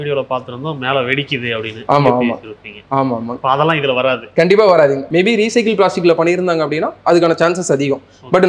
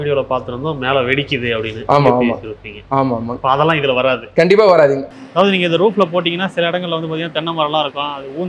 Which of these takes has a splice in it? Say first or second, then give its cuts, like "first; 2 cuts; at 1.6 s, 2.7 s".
second; 1 cut; at 5.0 s